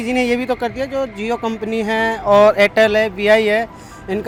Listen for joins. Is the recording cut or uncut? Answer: uncut